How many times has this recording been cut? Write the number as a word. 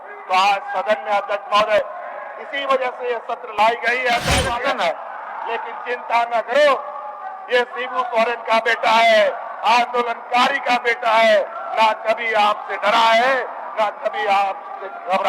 one